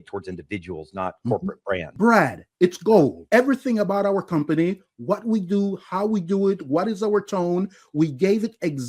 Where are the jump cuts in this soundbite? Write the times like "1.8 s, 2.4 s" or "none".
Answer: 1.9 s, 3.2 s